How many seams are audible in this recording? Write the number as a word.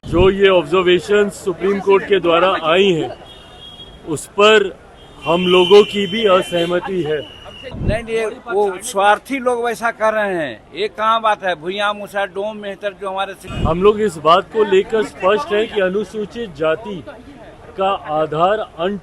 two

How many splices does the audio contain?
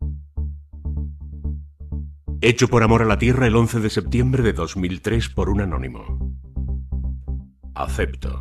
zero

